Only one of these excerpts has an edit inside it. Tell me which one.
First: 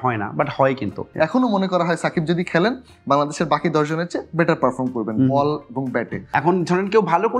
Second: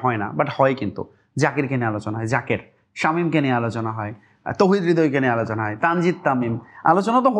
first; 2 cuts; at 1.0 s, 6.2 s

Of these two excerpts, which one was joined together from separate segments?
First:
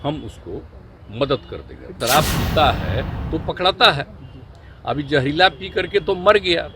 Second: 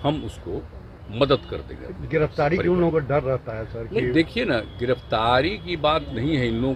first; 1 cut; at 1.9 s

